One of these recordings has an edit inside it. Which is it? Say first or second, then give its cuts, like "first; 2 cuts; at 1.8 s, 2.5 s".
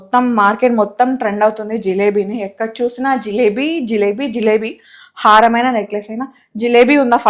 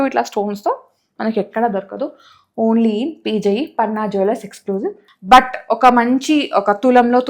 second; 1 cut; at 5.1 s